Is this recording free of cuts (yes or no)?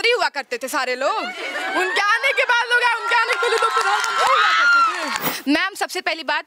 no